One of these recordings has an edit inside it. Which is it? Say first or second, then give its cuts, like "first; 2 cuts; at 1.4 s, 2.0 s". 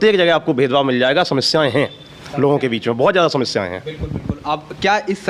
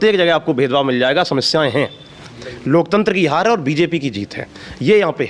second; 1 cut; at 2.2 s